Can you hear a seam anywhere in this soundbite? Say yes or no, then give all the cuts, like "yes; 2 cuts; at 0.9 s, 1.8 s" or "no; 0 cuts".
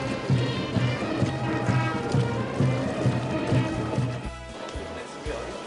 yes; 1 cut; at 1.2 s